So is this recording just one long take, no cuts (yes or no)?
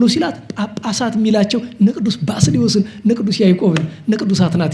yes